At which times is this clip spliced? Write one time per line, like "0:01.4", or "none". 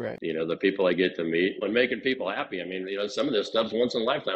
0:01.6